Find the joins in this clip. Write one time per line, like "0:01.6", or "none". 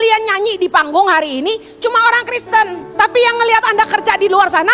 0:02.8